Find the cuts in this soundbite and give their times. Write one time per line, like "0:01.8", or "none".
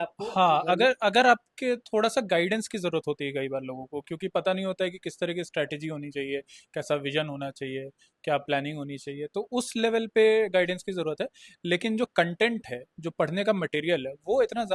none